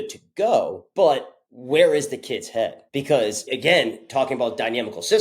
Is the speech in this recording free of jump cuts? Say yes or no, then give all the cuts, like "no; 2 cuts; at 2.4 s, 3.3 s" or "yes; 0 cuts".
no; 2 cuts; at 1.1 s, 2.9 s